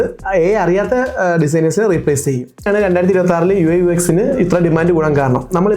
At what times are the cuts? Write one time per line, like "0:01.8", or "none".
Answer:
0:02.7